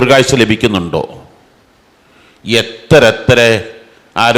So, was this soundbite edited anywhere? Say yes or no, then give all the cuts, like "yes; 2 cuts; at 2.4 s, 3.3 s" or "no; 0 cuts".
no; 0 cuts